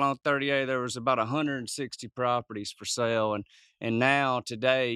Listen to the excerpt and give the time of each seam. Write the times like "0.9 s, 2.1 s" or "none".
none